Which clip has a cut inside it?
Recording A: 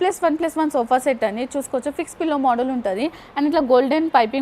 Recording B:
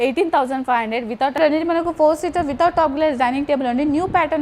B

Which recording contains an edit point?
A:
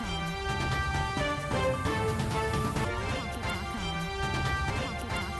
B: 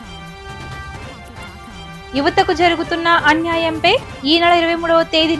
A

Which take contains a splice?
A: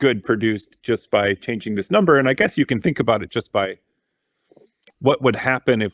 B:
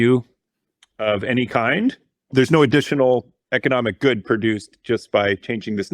B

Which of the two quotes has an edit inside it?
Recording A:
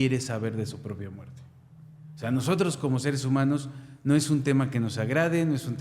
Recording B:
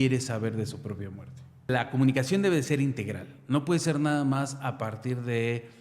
B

